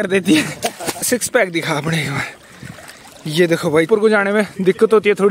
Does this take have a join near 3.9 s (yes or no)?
yes